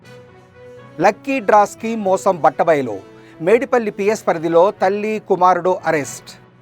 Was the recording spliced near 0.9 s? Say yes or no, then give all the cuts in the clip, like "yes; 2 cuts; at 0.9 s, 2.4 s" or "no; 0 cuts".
yes; 1 cut; at 0.9 s